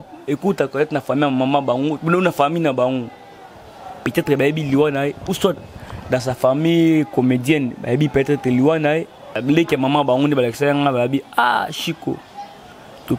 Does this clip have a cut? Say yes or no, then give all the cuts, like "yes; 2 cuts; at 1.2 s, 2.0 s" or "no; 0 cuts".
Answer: yes; 1 cut; at 9.4 s